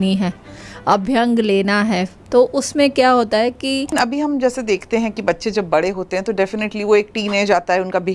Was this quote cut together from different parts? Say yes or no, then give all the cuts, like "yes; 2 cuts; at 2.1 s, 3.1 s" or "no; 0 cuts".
yes; 1 cut; at 3.9 s